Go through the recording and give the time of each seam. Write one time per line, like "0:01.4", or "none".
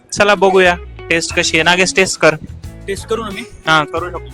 none

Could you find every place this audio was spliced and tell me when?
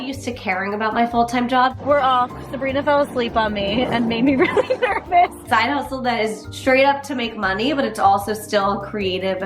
0:01.8
0:05.4

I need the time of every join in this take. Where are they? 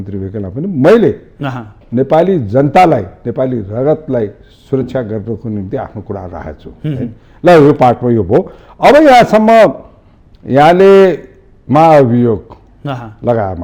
none

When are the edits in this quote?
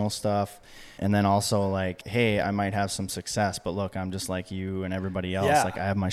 0:01.0
0:02.0

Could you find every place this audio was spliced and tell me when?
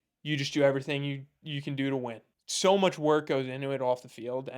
0:02.3

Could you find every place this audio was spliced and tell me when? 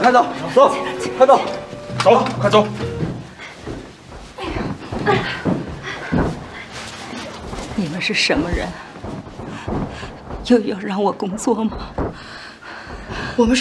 0:03.1

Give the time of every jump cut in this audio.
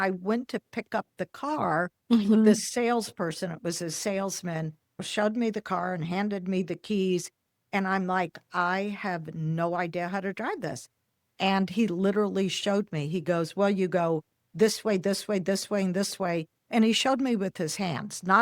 0:05.0

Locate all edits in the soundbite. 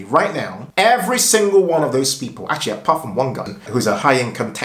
0:03.5

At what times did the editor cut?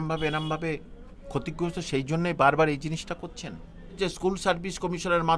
0:04.0

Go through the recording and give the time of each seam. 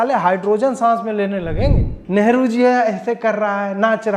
0:01.9

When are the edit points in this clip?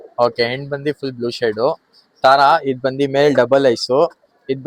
none

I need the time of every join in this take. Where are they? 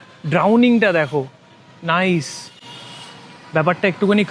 none

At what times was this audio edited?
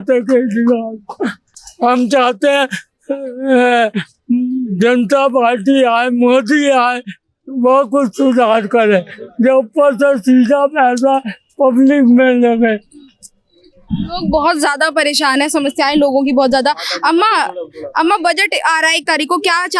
none

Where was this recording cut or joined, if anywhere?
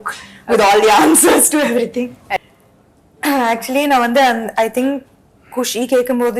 0:02.4

